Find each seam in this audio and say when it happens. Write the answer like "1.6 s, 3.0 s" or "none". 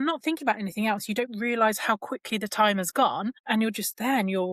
none